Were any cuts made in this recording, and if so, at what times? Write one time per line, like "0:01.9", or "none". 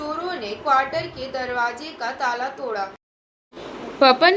none